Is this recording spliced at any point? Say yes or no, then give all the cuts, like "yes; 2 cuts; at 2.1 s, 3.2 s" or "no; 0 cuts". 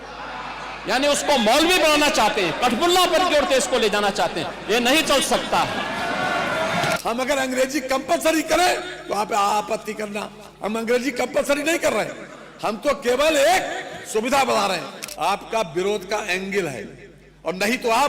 yes; 2 cuts; at 7.0 s, 15.0 s